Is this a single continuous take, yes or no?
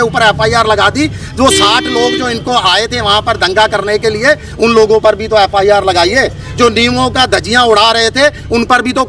yes